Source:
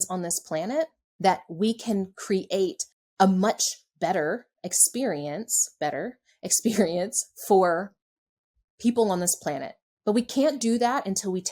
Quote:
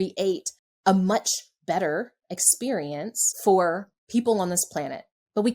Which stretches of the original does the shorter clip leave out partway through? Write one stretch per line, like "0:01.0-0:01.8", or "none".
0:05.6-0:07.3
0:08.0-0:08.6